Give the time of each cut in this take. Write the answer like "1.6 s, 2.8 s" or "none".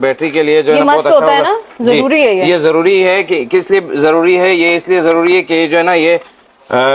none